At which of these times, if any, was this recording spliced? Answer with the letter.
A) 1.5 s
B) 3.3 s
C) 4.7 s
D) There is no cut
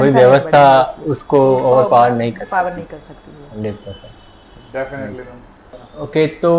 D